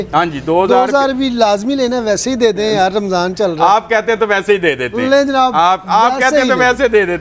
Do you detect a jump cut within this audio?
no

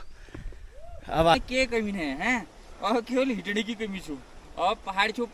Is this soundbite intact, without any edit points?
no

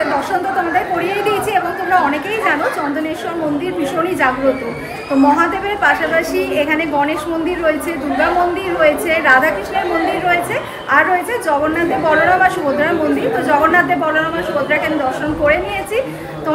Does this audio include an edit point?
no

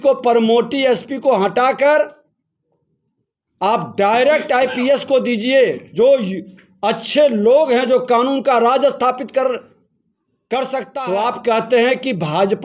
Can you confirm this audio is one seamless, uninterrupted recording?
no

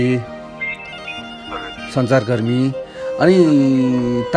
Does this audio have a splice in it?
no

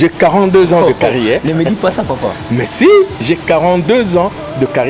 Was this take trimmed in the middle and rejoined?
no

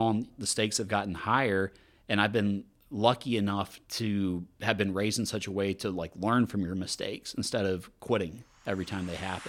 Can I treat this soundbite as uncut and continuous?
yes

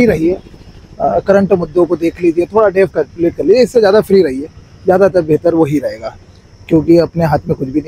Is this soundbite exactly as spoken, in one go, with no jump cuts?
yes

